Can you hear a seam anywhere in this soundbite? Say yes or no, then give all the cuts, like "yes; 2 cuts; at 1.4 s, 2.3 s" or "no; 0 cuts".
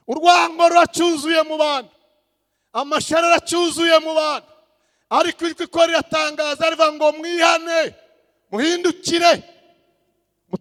no; 0 cuts